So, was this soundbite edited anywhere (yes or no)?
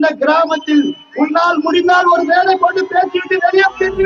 no